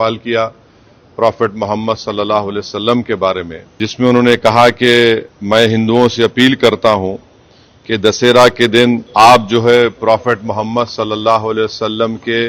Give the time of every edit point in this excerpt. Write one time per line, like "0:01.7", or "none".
0:03.6
0:05.3
0:09.0

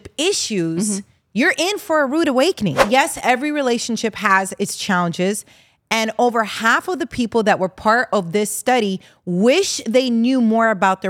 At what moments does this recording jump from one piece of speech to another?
0:02.8

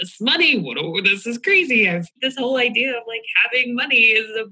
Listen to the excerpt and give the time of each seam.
0:02.1

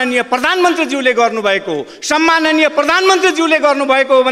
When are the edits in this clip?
none

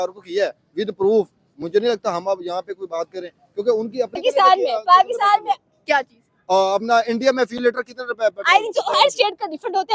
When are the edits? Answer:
0:04.2

